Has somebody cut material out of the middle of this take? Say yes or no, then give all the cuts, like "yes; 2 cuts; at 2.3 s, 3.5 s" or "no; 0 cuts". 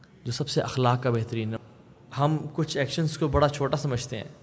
yes; 1 cut; at 1.6 s